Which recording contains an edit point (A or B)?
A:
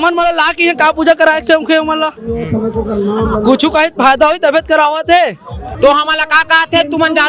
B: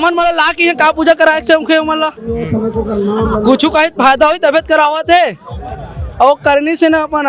A